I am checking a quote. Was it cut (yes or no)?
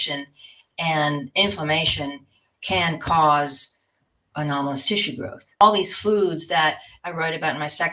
yes